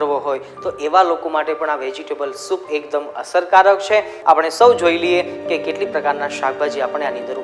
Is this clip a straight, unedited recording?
no; 1 cut; at 4.2 s

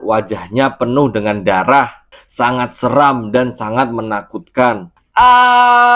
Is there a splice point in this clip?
yes; 1 cut; at 4.9 s

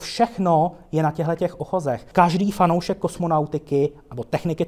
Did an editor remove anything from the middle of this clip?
yes; 1 cut; at 2.0 s

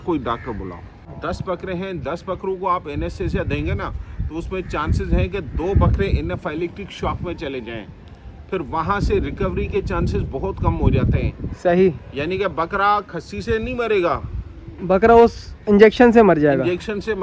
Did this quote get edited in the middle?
yes; 1 cut; at 1.1 s

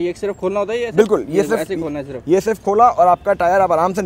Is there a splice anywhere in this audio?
no; 0 cuts

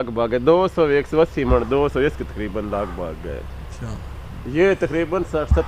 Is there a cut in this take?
no; 0 cuts

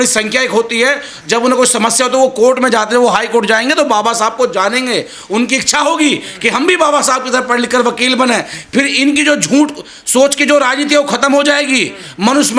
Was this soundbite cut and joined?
no; 0 cuts

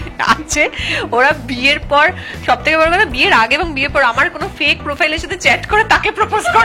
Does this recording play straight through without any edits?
yes; 0 cuts

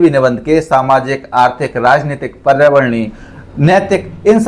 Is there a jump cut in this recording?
no; 0 cuts

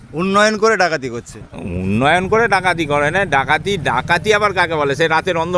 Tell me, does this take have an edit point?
no; 0 cuts

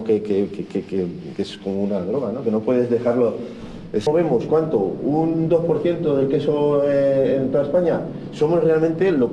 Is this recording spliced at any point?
yes; 1 cut; at 4.1 s

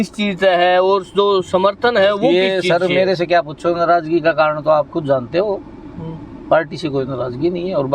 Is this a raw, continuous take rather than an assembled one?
yes; 0 cuts

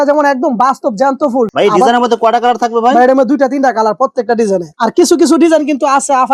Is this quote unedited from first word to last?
yes; 0 cuts

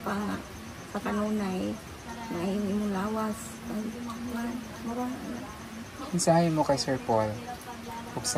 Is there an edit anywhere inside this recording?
no; 0 cuts

